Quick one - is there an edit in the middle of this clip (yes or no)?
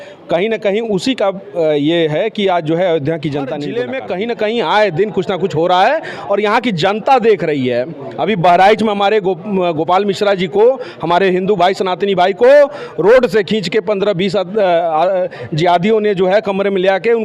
yes